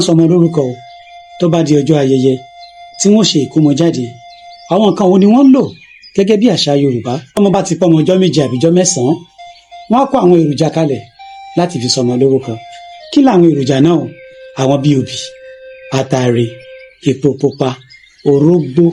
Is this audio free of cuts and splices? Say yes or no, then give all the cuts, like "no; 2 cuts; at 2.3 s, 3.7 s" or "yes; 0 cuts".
no; 1 cut; at 7.3 s